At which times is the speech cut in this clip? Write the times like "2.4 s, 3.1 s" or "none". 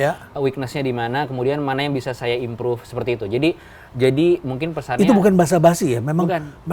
none